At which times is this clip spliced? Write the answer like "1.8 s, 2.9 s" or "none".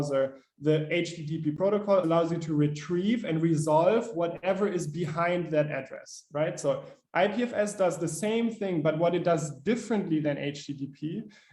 2.0 s

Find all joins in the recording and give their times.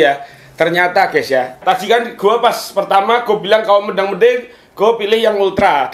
1.6 s

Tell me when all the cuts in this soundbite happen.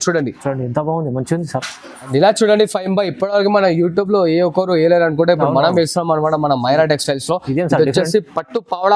2.1 s

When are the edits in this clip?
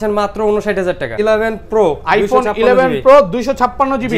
1.2 s

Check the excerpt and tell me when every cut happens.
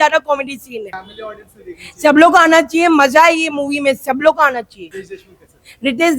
none

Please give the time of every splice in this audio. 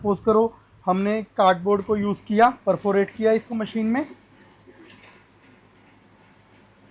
none

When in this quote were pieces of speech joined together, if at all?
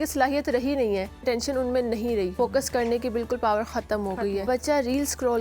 1.2 s, 2.3 s, 4.4 s

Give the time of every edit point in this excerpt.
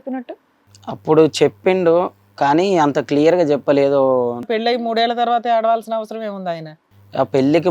4.5 s, 6.8 s

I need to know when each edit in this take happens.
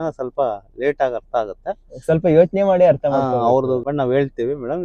3.9 s

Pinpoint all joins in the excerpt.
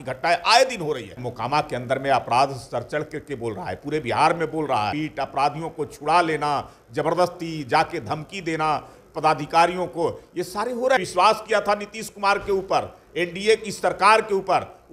1.3 s, 4.9 s, 11.0 s

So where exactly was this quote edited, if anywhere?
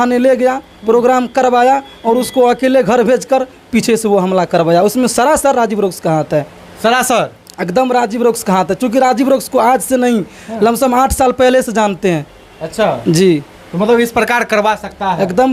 none

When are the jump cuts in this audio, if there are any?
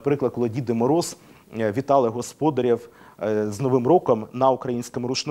none

